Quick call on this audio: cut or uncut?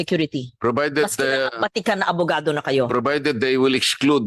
uncut